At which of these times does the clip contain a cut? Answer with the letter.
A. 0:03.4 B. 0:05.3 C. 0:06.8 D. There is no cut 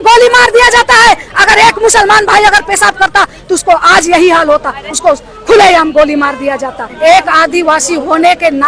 C